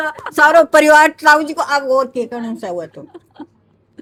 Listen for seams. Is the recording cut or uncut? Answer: uncut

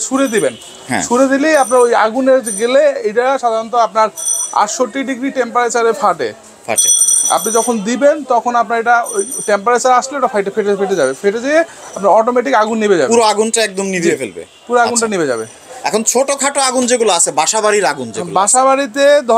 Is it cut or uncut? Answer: uncut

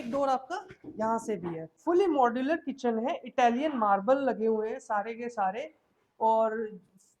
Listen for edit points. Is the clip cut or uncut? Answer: cut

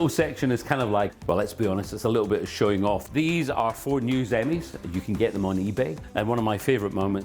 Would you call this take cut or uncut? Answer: cut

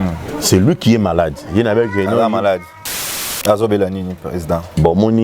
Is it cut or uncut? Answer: cut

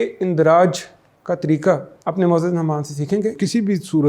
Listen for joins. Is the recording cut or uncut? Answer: cut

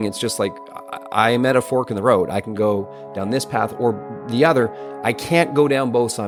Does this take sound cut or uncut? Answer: uncut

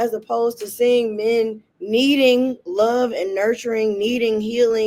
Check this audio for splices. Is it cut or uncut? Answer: uncut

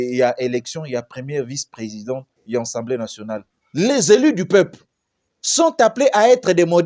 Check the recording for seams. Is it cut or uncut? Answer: cut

